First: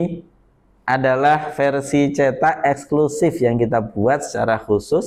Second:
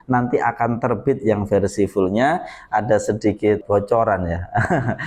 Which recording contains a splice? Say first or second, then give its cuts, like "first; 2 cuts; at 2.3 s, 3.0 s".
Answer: second; 1 cut; at 3.6 s